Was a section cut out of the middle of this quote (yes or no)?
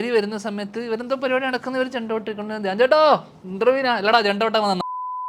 no